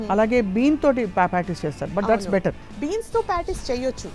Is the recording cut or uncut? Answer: cut